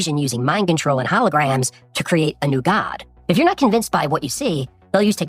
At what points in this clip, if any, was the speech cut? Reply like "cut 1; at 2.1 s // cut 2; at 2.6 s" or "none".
cut 1; at 3.1 s